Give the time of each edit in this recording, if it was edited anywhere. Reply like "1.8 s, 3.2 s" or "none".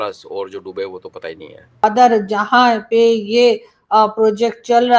1.8 s